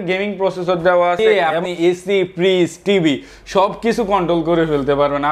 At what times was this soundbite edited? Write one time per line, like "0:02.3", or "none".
0:01.2